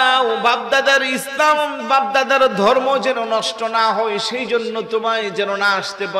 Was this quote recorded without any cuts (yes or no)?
yes